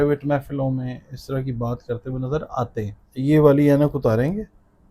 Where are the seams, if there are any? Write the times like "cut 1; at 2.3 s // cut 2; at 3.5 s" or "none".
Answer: cut 1; at 3.0 s